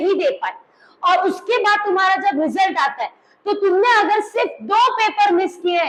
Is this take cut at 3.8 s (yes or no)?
no